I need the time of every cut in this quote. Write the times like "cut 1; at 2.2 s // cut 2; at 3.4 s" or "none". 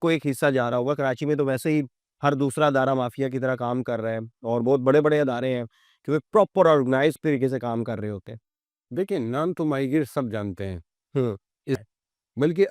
cut 1; at 11.8 s